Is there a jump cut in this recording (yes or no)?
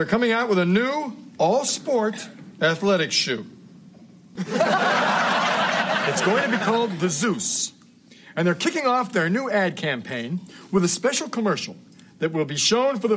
yes